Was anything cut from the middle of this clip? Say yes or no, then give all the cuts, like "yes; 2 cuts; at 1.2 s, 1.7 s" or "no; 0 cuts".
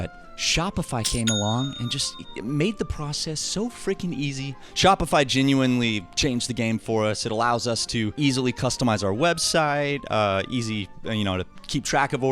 yes; 2 cuts; at 4.6 s, 8.1 s